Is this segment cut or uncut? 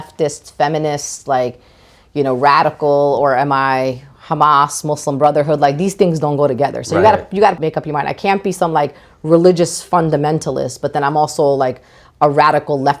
uncut